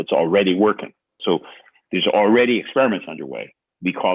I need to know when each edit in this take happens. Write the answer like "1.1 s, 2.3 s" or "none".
1.2 s